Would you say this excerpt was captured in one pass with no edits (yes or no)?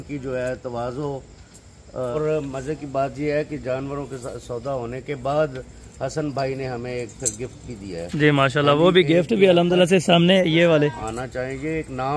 no